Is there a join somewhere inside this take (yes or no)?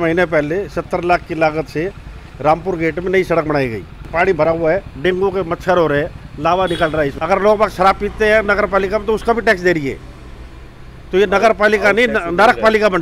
yes